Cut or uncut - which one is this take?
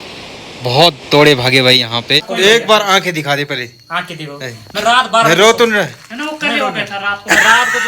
cut